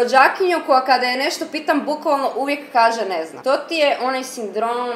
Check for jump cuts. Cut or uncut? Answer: uncut